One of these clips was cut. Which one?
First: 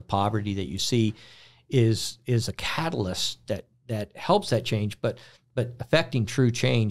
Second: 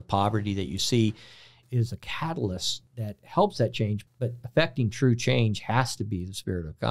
second; 3 cuts; at 1.5 s, 2.8 s, 4.0 s

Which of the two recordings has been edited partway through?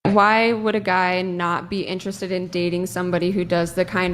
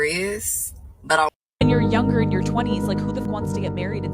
second; 2 cuts; at 1.3 s, 3.2 s

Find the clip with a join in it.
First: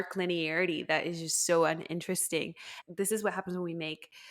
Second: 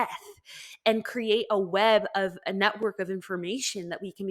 first; 1 cut; at 2.7 s

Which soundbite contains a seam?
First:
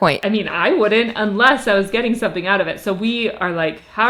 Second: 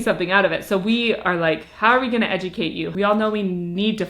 second; 1 cut; at 2.9 s

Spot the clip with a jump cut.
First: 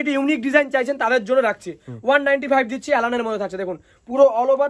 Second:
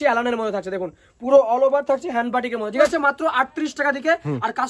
second; 1 cut; at 2.8 s

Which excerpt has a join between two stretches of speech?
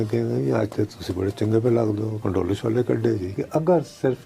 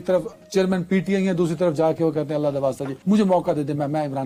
first; 2 cuts; at 2.2 s, 3.3 s

